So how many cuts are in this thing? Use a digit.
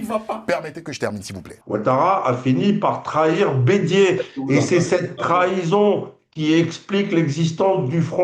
1